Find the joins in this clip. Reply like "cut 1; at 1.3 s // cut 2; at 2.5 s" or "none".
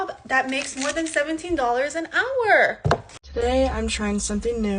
cut 1; at 3.2 s